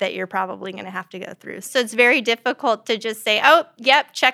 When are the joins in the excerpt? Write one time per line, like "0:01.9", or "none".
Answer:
0:01.7